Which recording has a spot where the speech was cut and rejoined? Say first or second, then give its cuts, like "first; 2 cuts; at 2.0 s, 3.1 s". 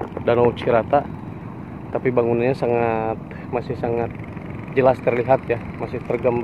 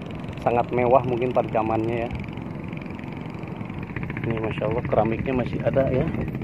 second; 1 cut; at 3.9 s